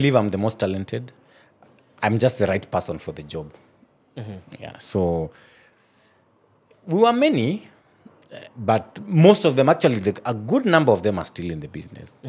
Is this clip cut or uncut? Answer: uncut